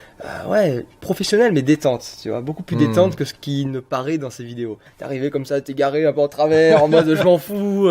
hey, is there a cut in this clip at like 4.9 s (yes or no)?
yes